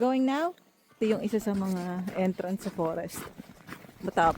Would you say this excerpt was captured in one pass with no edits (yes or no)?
no